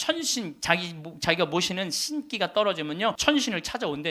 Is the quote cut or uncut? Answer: cut